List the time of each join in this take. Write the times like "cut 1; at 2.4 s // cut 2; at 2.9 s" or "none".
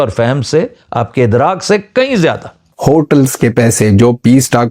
cut 1; at 2.6 s